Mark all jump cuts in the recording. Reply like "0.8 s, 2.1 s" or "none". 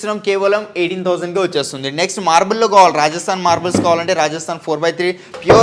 none